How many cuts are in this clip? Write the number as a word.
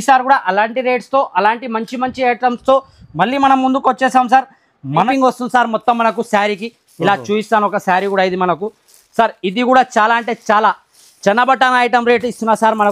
one